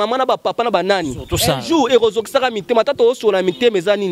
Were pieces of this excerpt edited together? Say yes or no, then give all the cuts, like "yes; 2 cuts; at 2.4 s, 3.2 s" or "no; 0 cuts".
no; 0 cuts